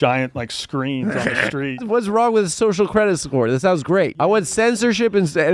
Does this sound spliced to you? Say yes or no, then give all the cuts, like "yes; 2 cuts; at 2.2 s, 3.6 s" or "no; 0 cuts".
yes; 2 cuts; at 1.8 s, 4.2 s